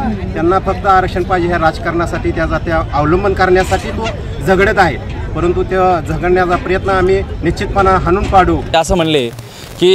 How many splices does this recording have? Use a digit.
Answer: 1